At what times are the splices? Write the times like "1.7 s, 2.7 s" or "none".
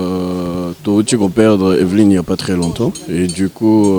none